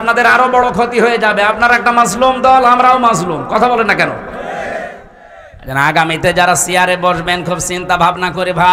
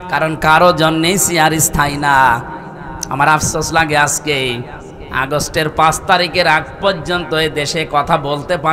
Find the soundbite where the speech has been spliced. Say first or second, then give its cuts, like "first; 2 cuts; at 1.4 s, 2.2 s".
first; 1 cut; at 5.5 s